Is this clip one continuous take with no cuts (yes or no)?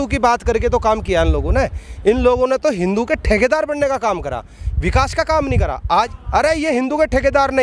no